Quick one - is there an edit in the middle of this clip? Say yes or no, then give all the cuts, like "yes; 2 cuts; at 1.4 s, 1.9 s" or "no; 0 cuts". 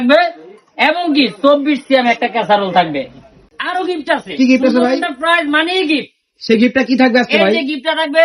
yes; 1 cut; at 3.6 s